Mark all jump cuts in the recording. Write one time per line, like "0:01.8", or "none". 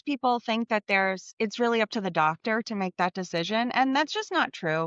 0:01.3